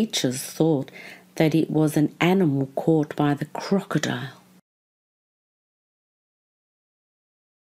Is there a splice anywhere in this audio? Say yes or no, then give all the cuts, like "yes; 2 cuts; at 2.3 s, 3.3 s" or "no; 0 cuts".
no; 0 cuts